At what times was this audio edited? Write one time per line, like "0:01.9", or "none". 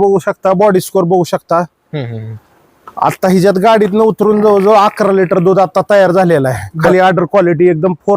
0:06.8